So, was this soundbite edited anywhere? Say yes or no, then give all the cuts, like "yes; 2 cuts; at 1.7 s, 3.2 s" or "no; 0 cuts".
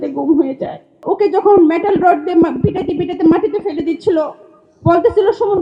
yes; 1 cut; at 0.9 s